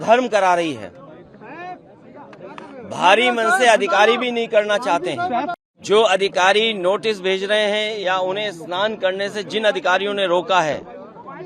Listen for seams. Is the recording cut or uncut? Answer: cut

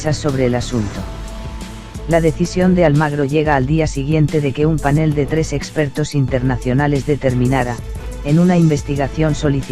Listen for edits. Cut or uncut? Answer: uncut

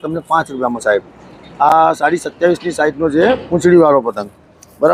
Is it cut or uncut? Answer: uncut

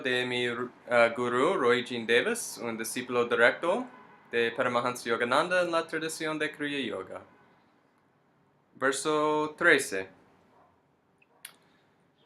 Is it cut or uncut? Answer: uncut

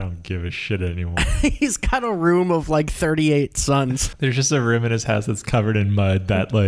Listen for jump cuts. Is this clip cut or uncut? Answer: cut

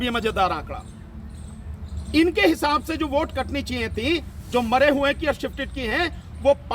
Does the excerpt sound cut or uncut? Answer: uncut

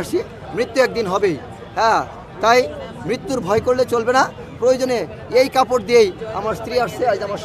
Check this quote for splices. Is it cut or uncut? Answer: uncut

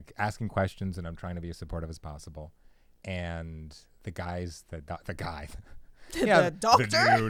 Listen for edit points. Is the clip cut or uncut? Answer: uncut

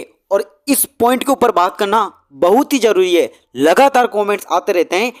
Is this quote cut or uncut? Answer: uncut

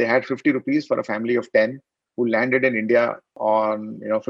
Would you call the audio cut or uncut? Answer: cut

